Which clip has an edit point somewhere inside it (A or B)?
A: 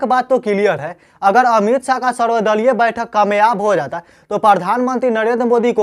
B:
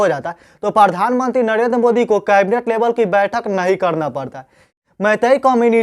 B